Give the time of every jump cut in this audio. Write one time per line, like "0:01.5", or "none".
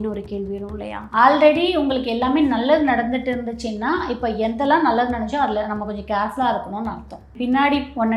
0:01.0
0:07.2